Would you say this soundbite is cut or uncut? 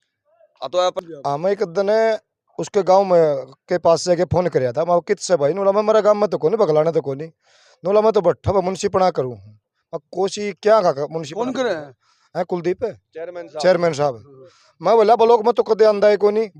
cut